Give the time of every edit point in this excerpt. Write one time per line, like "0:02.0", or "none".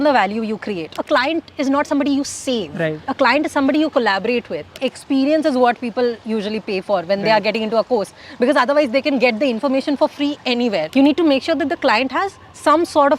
0:00.9
0:03.0
0:04.8
0:10.9